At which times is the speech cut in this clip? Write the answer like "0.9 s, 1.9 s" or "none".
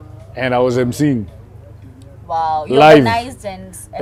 none